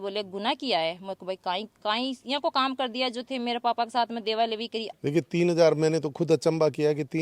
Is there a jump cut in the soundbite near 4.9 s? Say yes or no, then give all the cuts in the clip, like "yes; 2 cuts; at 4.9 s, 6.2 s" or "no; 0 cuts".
yes; 1 cut; at 4.9 s